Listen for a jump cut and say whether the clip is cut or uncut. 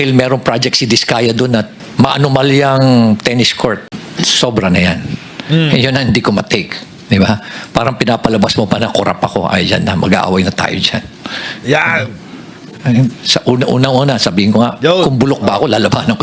uncut